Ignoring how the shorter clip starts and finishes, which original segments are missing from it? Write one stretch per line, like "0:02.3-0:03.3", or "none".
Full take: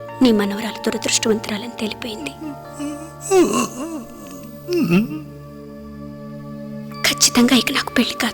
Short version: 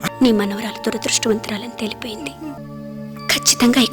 0:02.6-0:06.3